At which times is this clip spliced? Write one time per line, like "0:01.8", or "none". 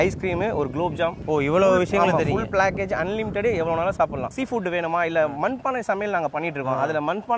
0:04.3